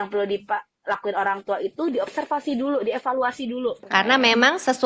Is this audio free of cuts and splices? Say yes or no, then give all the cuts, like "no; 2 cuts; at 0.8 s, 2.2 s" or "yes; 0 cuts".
no; 1 cut; at 3.8 s